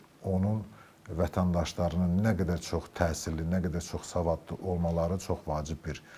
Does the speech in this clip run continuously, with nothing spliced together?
yes; 0 cuts

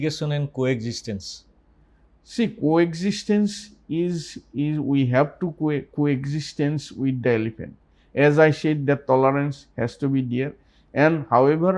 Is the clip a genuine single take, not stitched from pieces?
yes; 0 cuts

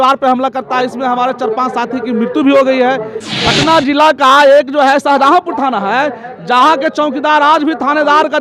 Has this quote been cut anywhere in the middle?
yes; 1 cut; at 3.2 s

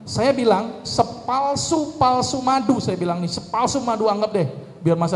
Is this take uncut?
yes; 0 cuts

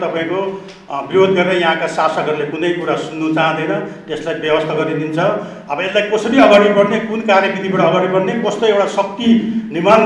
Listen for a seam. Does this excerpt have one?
no; 0 cuts

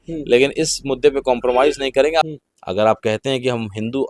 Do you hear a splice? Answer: yes; 1 cut; at 2.3 s

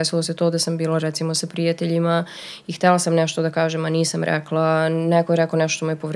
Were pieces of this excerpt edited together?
no; 0 cuts

